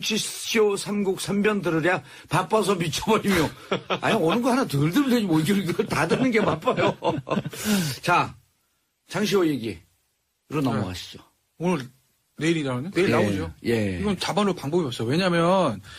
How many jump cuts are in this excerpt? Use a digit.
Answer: 1